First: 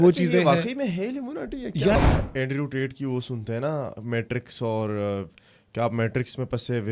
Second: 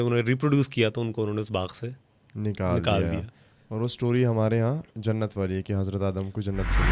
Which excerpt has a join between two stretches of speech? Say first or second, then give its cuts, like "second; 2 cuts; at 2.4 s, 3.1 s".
first; 1 cut; at 2.0 s